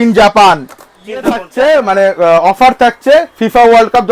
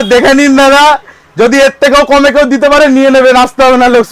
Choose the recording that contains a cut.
first; 1 cut; at 1.5 s

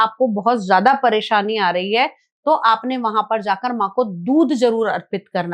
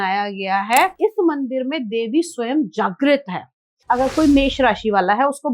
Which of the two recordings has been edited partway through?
second; 2 cuts; at 0.9 s, 3.8 s

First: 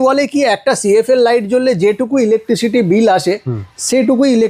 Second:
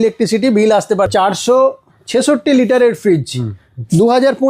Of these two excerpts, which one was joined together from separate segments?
second; 1 cut; at 1.1 s

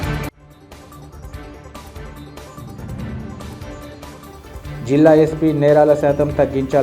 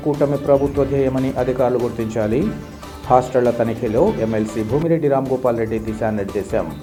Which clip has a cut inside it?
first; 1 cut; at 2.0 s

